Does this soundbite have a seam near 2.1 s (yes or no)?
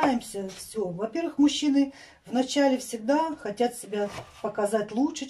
no